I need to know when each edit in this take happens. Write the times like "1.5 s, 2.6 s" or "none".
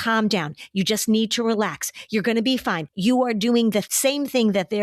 2.9 s, 3.9 s